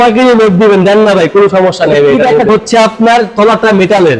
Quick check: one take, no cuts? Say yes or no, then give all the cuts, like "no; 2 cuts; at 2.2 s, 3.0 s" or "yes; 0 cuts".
no; 1 cut; at 2.5 s